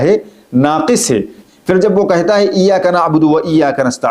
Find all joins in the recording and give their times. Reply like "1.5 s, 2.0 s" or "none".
1.5 s